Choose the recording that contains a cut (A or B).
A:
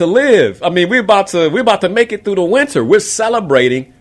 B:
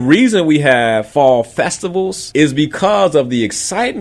B